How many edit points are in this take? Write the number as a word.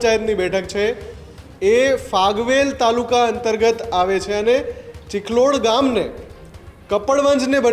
zero